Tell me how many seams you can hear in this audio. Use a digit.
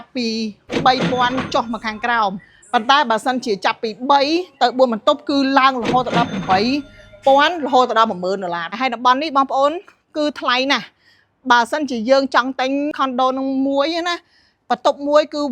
2